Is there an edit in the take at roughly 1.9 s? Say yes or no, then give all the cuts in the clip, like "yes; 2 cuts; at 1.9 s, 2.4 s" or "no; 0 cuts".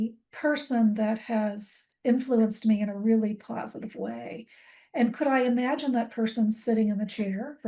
no; 0 cuts